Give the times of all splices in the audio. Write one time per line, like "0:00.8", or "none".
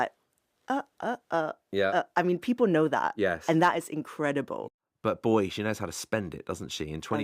0:04.6